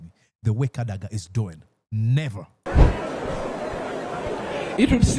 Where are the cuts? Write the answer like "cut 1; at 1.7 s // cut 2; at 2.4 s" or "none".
cut 1; at 2.7 s